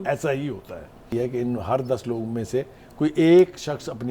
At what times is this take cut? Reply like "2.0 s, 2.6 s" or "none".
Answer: 1.0 s